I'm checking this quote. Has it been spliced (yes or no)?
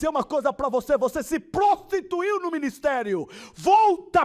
no